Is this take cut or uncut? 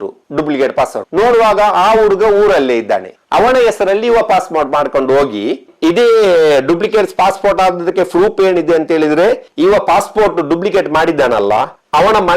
cut